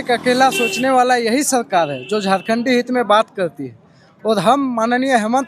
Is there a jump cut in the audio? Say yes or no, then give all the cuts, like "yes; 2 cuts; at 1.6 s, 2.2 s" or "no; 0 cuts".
no; 0 cuts